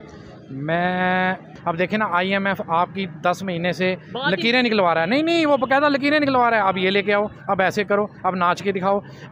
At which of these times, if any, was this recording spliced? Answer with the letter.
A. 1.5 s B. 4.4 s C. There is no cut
A